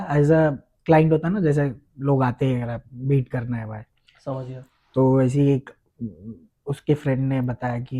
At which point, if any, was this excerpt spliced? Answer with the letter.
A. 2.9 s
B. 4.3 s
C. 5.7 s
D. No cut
D